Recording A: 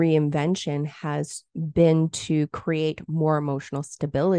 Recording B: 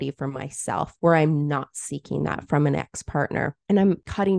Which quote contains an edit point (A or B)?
B